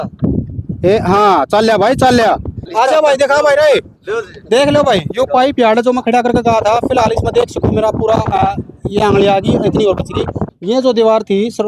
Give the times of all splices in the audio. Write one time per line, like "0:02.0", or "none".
0:02.6
0:10.4

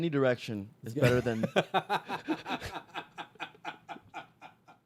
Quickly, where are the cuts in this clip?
none

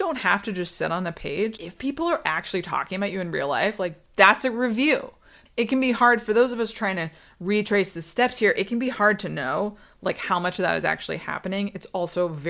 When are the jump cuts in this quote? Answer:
0:01.5
0:05.3

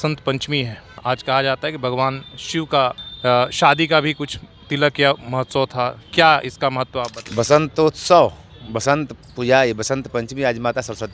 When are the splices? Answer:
0:01.0
0:03.1
0:07.2

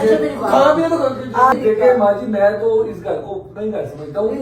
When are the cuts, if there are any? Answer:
0:01.6

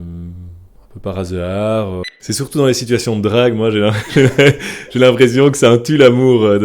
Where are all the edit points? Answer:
0:02.0

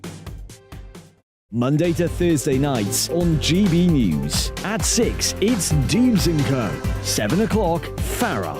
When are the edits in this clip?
0:01.4

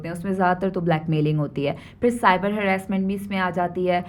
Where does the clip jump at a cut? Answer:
none

